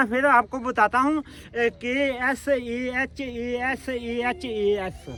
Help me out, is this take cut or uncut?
uncut